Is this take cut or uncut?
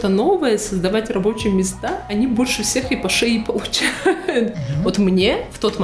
cut